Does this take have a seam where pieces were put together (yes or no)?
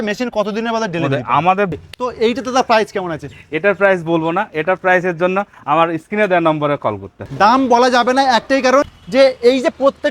yes